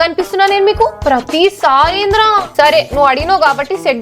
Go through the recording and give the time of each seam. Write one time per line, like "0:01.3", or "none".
0:01.0

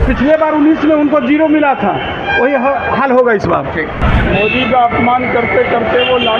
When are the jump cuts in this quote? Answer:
0:04.0

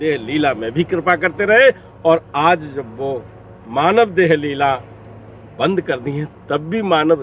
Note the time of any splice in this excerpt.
none

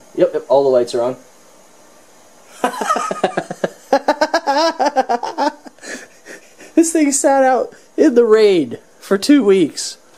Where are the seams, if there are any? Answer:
none

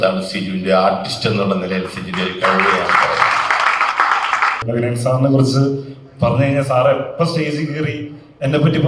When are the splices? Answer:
0:04.6

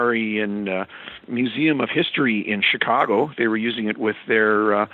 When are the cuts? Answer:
0:01.1

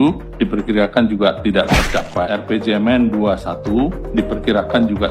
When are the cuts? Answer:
0:02.3

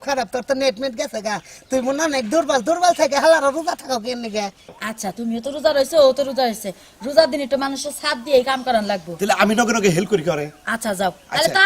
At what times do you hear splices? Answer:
0:04.7

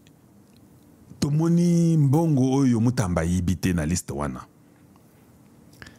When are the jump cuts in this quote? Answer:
none

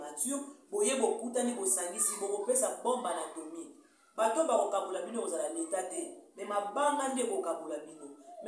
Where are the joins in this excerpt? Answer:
none

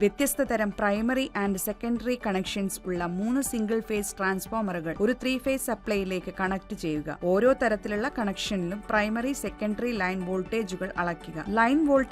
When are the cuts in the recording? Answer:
0:04.9
0:07.1

